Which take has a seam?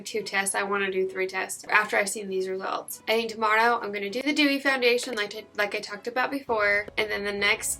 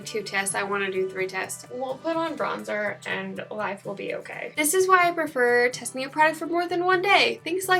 second; 2 cuts; at 1.6 s, 4.5 s

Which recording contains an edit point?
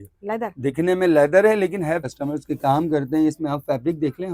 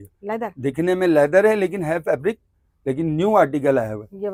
first; 1 cut; at 2.0 s

